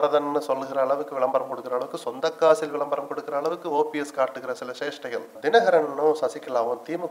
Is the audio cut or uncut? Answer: cut